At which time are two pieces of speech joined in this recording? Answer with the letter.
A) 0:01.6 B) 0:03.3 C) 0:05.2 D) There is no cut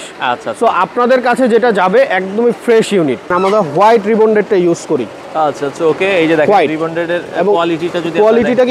B